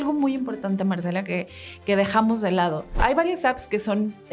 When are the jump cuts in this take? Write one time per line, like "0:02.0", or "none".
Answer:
0:03.0